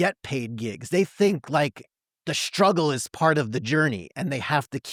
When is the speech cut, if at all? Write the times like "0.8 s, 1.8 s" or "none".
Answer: none